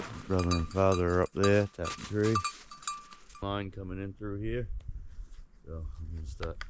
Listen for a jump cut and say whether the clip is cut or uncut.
cut